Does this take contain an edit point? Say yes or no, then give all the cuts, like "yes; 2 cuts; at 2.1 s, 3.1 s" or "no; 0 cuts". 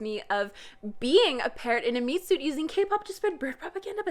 no; 0 cuts